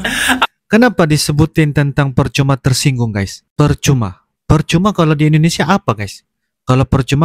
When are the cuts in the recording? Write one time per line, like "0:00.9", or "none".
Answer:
none